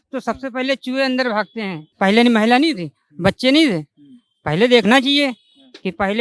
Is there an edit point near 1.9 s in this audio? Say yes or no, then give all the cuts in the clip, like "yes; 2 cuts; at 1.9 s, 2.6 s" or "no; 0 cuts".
yes; 1 cut; at 1.9 s